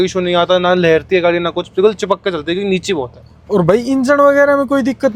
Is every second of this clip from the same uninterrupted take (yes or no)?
yes